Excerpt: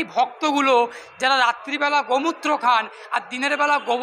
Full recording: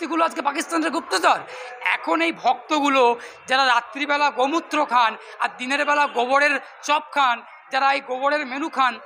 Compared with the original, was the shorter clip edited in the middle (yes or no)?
no